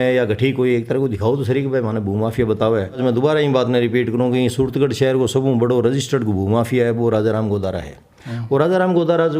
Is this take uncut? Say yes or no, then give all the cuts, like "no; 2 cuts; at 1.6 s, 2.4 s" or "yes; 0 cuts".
no; 1 cut; at 3.0 s